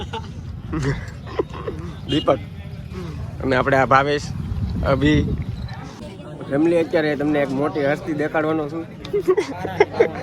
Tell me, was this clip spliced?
yes; 1 cut; at 6.1 s

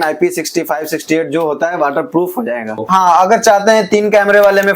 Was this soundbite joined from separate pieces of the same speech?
yes; 1 cut; at 2.8 s

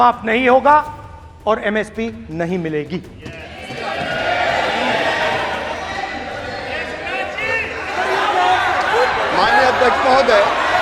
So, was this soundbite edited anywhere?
no; 0 cuts

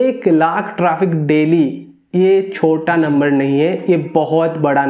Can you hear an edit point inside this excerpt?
no; 0 cuts

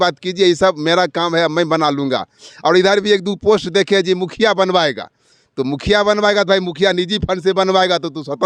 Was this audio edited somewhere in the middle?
no; 0 cuts

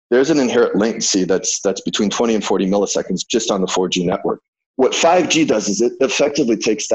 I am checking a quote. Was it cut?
no; 0 cuts

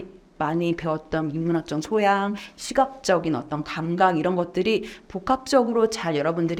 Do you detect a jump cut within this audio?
no; 0 cuts

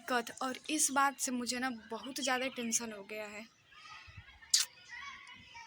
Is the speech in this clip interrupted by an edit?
no; 0 cuts

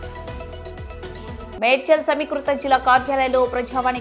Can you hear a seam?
yes; 1 cut; at 1.2 s

